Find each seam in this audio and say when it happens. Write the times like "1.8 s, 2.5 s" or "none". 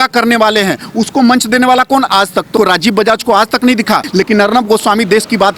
2.5 s, 4.0 s